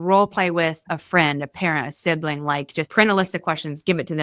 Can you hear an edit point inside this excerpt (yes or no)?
no